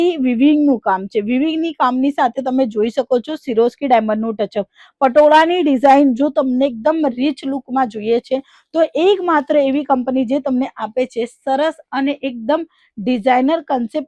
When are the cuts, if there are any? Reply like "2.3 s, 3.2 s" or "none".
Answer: none